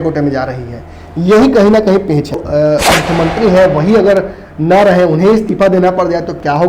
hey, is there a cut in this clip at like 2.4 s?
yes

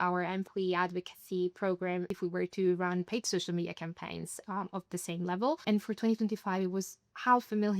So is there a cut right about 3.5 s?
no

